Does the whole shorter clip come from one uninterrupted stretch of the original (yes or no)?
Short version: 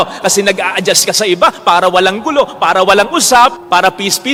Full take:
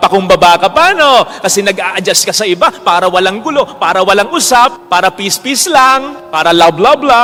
yes